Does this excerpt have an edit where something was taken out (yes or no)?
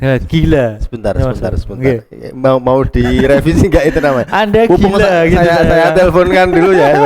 no